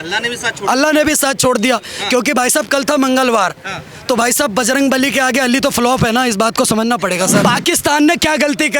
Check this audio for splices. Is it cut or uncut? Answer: cut